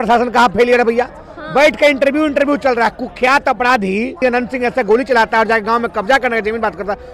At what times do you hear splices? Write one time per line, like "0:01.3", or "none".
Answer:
none

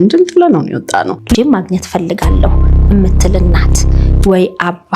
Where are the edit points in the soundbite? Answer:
none

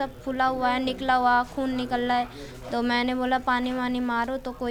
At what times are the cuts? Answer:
none

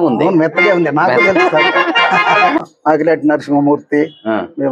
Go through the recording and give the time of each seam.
0:02.7

